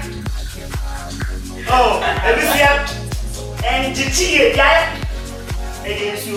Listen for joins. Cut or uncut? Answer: uncut